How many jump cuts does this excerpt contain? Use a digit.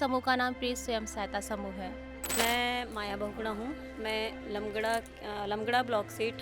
1